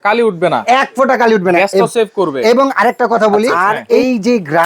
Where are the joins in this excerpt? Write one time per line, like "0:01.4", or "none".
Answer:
0:03.5

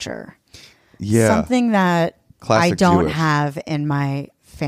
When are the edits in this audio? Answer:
0:02.3

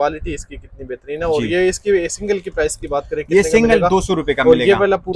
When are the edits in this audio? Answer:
none

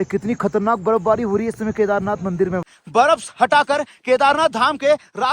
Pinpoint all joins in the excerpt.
0:02.7

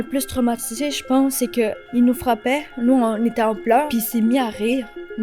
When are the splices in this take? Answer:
0:01.8
0:03.9

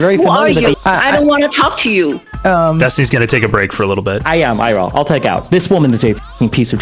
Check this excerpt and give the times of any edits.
0:00.7
0:02.3
0:04.2

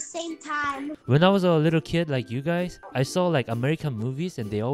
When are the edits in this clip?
0:01.0

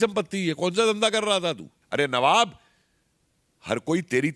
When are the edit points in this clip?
0:01.7

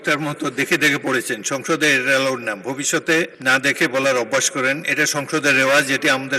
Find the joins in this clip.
0:03.4

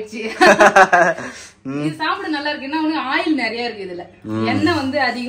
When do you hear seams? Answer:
none

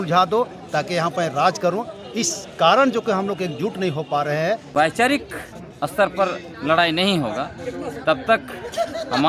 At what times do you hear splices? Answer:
0:04.7

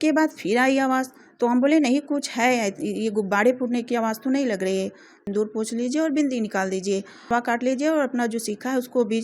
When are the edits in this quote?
0:05.2
0:07.3

